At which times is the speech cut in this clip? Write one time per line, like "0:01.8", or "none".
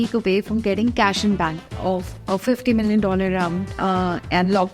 0:01.7
0:03.7